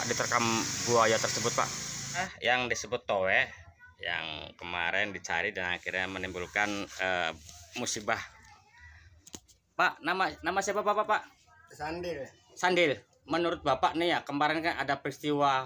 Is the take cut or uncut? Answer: cut